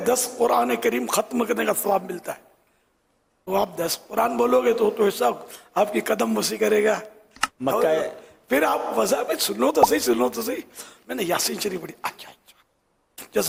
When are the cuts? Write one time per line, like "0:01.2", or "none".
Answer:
none